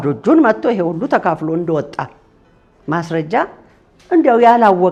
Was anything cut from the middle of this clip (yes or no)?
no